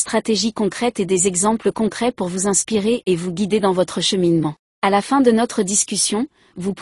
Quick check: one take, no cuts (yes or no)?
no